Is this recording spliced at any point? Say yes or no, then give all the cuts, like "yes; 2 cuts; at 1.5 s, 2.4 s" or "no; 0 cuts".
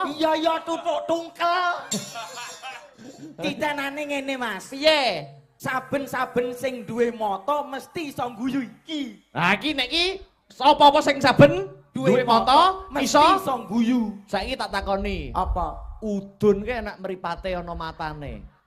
no; 0 cuts